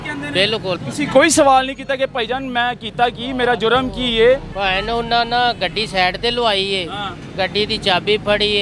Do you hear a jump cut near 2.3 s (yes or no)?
no